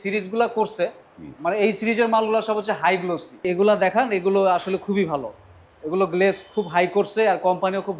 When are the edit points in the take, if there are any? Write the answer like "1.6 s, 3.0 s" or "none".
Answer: 3.5 s